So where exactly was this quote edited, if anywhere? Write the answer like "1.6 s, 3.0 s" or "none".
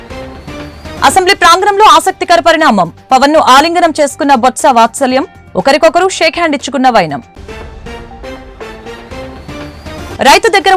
1.0 s